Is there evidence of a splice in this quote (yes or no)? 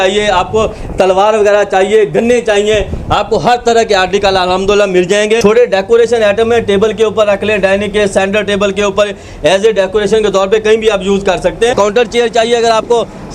yes